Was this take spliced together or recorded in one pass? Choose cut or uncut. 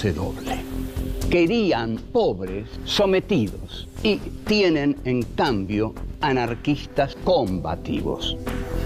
uncut